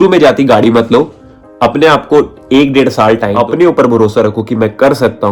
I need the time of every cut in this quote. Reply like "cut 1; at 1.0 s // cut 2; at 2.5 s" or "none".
cut 1; at 3.3 s